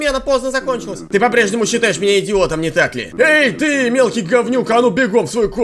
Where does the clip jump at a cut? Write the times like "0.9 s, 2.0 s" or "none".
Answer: 0.9 s, 3.0 s